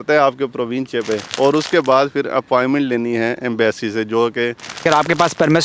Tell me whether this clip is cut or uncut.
cut